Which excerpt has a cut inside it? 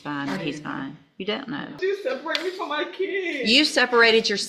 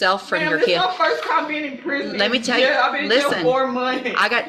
first; 1 cut; at 1.8 s

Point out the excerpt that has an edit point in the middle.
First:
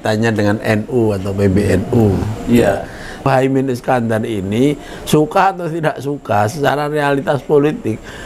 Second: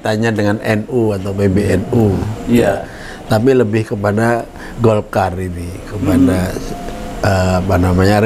first; 1 cut; at 3.3 s

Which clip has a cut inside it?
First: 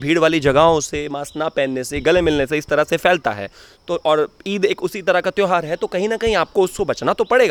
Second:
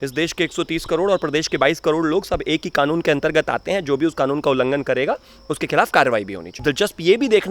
second; 1 cut; at 6.5 s

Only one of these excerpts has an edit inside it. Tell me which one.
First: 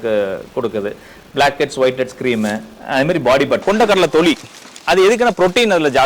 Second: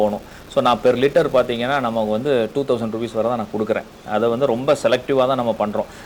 first; 1 cut; at 3.6 s

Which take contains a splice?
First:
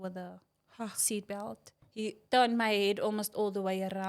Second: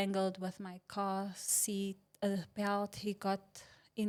first; 1 cut; at 1.8 s

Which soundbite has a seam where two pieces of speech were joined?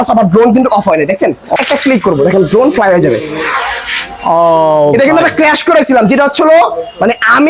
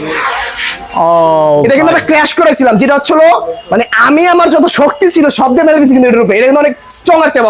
first; 1 cut; at 1.5 s

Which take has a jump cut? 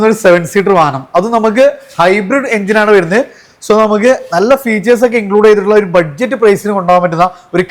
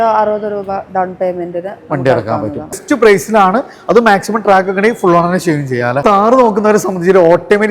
second; 2 cuts; at 2.8 s, 6.0 s

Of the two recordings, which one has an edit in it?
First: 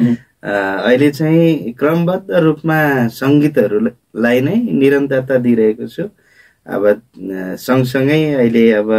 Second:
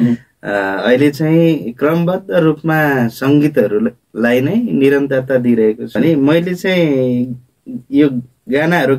second; 1 cut; at 6.0 s

